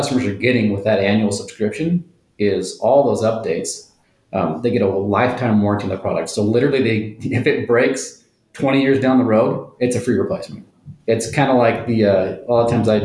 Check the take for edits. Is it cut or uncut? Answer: cut